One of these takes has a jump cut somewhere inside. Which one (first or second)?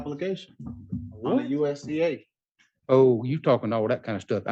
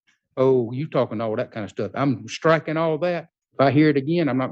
second